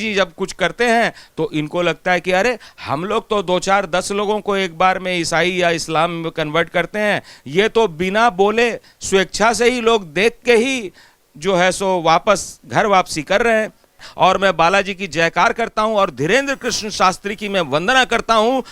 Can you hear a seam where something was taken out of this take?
yes; 1 cut; at 14.1 s

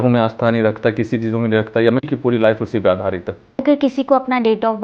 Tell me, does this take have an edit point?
yes; 2 cuts; at 2.1 s, 3.6 s

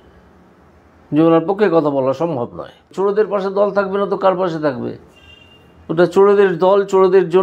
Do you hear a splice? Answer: yes; 1 cut; at 2.9 s

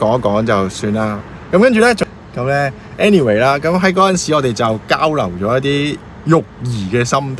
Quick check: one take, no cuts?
no; 1 cut; at 2.0 s

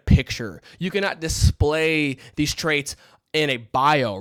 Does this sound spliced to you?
no; 0 cuts

